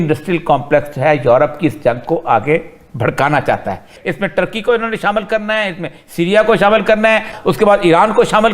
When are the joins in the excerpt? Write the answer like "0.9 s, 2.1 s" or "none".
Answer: 3.9 s, 7.3 s